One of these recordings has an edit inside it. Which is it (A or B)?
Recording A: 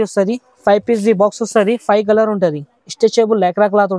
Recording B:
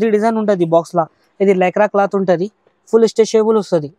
B